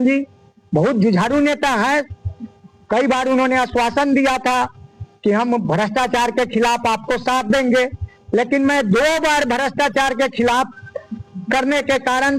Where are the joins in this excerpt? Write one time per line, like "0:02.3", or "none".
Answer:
none